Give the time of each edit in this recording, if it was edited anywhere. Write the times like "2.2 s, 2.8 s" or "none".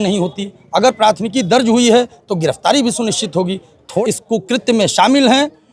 3.8 s